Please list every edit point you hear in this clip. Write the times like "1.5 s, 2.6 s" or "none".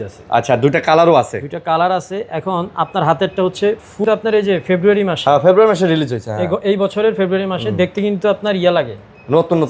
4.0 s